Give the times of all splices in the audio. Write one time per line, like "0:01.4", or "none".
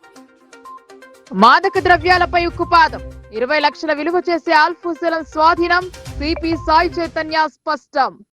0:01.2